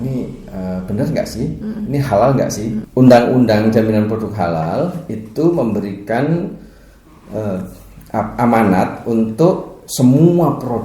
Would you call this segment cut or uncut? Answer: cut